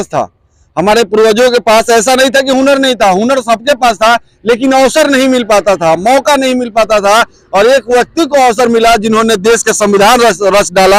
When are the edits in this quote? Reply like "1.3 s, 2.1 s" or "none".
none

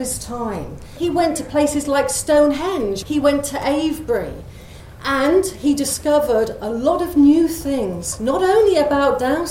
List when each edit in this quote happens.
0.9 s, 3.0 s

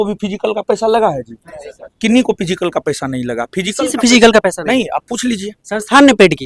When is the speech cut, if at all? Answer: none

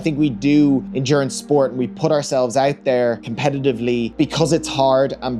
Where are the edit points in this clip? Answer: 0.9 s, 3.3 s, 4.1 s

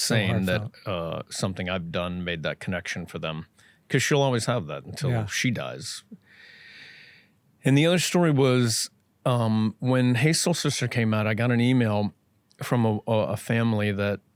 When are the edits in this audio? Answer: none

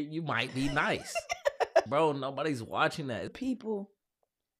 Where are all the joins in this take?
1.9 s, 3.3 s

